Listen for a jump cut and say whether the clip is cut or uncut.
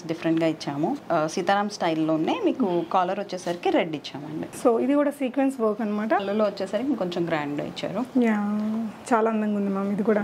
cut